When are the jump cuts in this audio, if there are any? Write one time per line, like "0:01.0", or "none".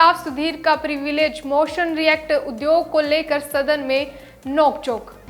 none